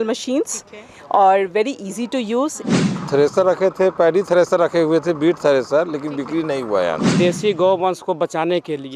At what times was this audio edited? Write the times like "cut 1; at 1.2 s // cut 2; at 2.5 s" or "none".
cut 1; at 3.0 s // cut 2; at 7.1 s